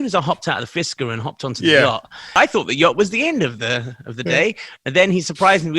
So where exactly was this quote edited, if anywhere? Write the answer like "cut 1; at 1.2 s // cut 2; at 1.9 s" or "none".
cut 1; at 2.3 s